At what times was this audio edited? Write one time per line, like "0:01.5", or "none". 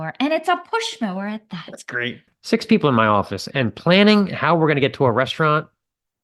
0:02.3